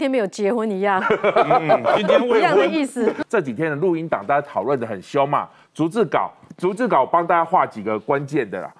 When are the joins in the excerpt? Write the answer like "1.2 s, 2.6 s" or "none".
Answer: 3.2 s